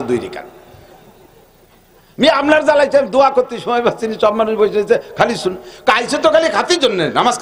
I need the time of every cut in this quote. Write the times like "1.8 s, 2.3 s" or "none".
none